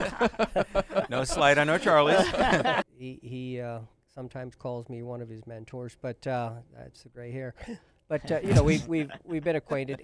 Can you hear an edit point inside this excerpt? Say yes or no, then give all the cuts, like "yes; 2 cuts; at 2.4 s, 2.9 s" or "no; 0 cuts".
yes; 1 cut; at 2.8 s